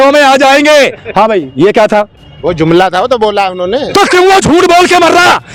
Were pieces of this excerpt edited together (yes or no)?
no